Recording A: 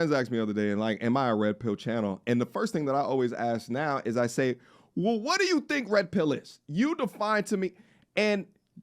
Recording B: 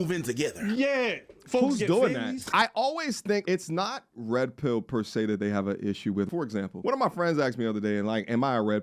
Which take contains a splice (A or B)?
B